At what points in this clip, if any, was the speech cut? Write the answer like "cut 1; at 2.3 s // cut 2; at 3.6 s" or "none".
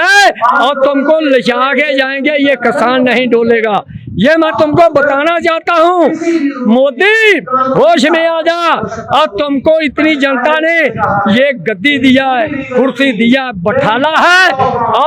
none